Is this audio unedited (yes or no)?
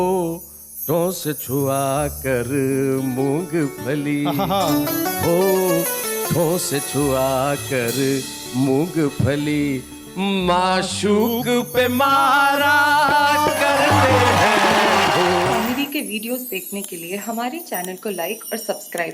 no